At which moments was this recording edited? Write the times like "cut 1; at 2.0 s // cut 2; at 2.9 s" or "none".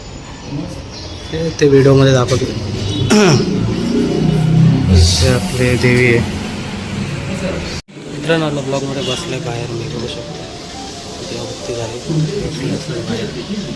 cut 1; at 7.8 s